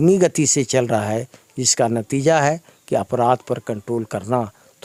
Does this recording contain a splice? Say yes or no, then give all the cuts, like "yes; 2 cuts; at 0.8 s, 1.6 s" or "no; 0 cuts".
no; 0 cuts